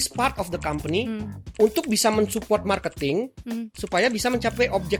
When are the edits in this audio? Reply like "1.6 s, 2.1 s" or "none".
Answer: none